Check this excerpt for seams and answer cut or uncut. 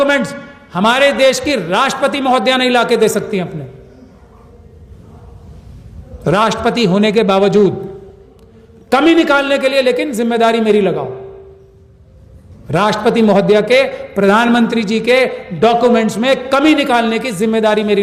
uncut